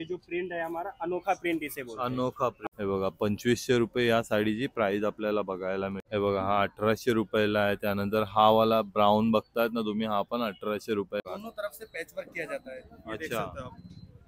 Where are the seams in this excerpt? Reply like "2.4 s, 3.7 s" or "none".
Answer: 2.6 s, 6.0 s, 11.2 s